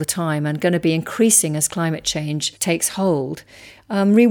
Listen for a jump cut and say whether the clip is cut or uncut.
cut